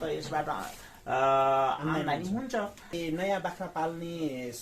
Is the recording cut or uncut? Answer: cut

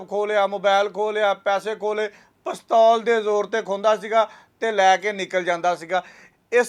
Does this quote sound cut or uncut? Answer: uncut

